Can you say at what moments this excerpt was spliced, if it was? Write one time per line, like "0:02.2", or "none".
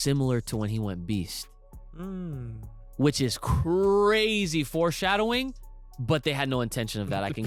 none